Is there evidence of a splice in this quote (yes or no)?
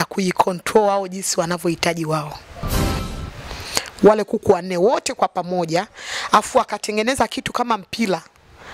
yes